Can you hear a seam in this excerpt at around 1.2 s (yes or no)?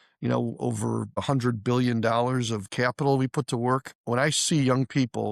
yes